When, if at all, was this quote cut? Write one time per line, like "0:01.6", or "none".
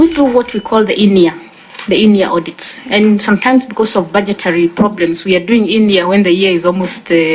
none

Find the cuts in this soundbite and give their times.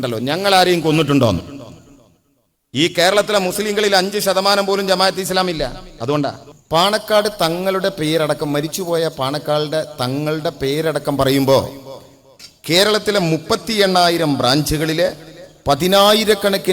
0:06.5

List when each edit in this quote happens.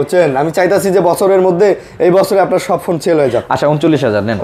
none

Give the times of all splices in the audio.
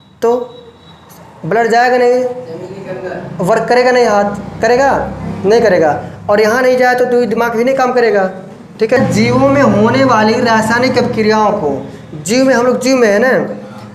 0:09.0

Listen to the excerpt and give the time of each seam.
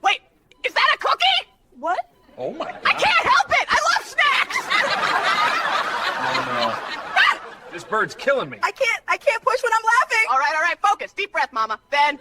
none

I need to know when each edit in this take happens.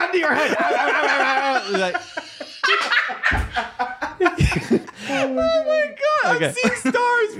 0:05.0

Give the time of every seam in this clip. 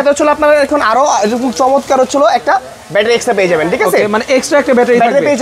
none

